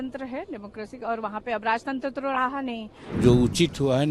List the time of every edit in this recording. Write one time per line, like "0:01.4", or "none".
0:03.0